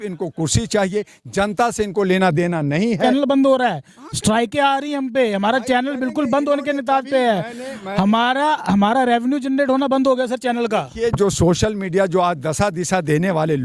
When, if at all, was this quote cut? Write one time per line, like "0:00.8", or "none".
0:03.0